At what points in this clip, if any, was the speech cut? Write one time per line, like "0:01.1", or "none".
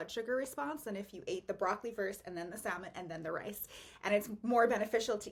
none